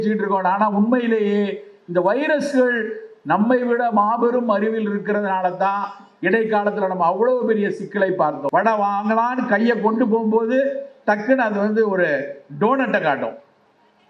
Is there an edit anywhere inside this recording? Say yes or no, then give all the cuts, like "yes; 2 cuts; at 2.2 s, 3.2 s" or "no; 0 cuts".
yes; 1 cut; at 8.4 s